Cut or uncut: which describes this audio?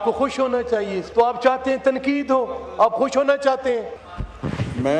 cut